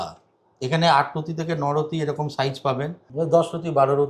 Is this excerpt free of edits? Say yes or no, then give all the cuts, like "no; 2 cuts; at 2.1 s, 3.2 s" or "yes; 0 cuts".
no; 1 cut; at 3.0 s